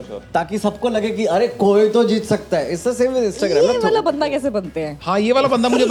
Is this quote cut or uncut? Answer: uncut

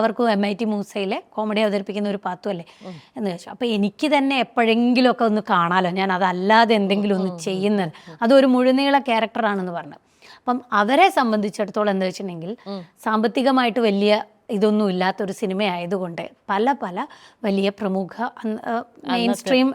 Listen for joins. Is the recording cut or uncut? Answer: uncut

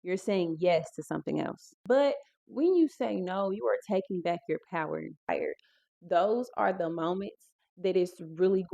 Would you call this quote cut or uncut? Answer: cut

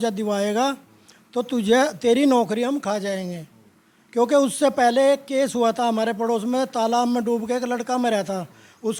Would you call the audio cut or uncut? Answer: uncut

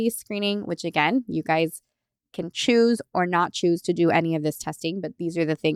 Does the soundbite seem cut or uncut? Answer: uncut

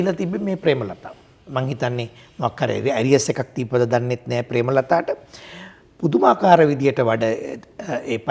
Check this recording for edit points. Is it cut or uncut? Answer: uncut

